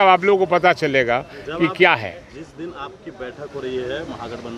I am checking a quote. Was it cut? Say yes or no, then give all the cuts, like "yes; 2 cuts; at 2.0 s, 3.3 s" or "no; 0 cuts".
no; 0 cuts